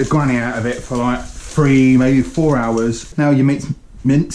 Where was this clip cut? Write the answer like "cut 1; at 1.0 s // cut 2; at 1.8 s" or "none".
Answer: cut 1; at 3.0 s